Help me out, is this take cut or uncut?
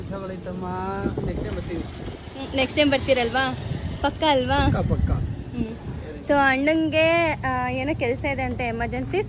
uncut